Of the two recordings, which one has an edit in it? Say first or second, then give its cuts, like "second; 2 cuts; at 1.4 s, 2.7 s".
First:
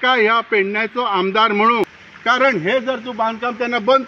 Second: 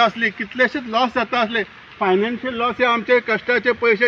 first; 1 cut; at 1.9 s